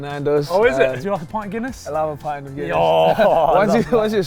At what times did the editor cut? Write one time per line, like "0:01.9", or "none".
0:01.0